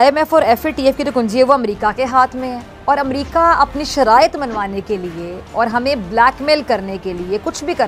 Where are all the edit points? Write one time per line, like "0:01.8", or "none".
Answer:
none